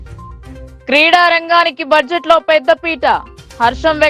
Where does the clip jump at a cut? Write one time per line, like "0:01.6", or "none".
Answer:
none